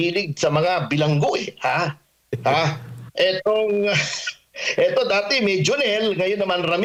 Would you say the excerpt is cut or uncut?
uncut